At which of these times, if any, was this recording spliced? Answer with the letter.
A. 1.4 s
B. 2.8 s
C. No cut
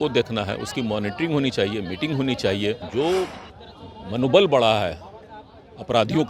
B